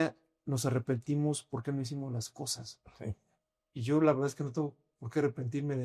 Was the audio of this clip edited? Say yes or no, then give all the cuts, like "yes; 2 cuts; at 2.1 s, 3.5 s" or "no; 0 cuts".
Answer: no; 0 cuts